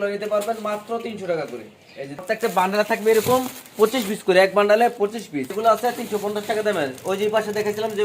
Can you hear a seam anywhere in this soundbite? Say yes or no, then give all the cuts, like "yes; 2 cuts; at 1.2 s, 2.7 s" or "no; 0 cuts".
yes; 2 cuts; at 2.2 s, 5.5 s